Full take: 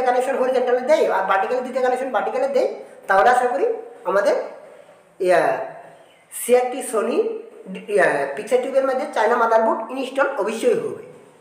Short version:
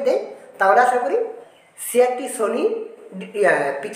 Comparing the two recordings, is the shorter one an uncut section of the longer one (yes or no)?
no